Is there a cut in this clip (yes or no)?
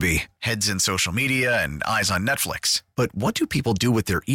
no